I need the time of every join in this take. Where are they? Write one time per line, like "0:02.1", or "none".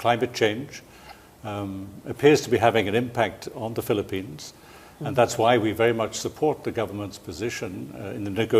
0:03.3